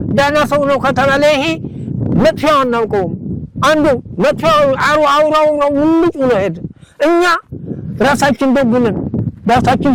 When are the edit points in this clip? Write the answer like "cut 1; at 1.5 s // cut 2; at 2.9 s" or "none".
none